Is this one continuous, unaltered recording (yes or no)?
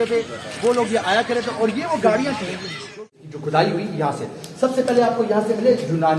no